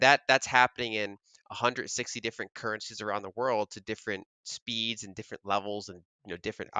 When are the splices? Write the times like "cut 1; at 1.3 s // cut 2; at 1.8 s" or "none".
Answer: none